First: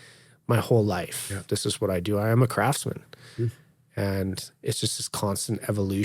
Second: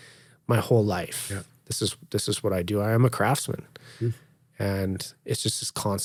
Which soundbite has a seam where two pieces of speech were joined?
first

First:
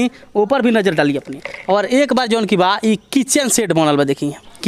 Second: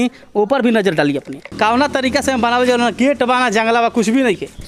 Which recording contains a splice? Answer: second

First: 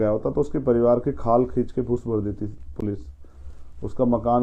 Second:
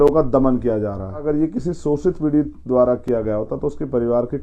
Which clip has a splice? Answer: second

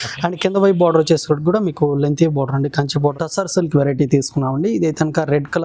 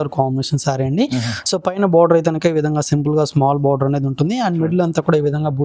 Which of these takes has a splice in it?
first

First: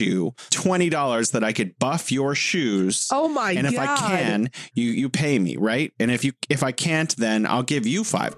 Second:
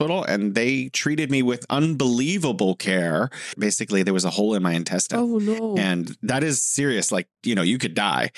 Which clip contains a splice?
second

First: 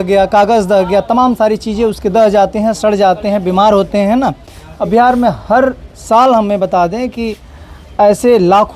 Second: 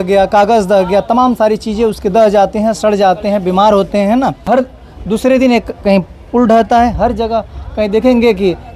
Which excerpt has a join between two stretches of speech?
second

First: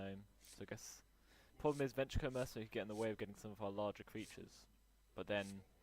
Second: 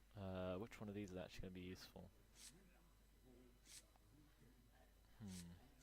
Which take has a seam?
first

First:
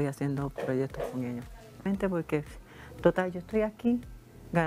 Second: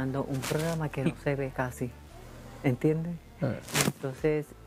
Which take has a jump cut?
first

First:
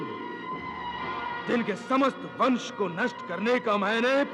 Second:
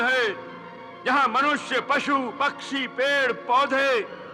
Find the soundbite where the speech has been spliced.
first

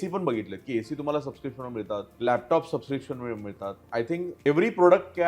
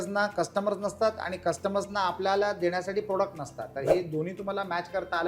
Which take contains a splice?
first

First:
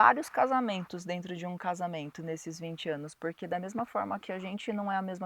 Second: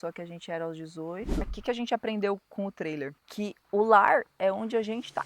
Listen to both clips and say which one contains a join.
second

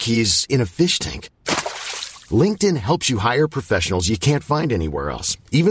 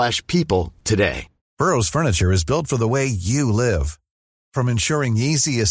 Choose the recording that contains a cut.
second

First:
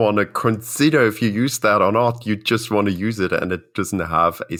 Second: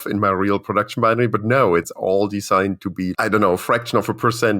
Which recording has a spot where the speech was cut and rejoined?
second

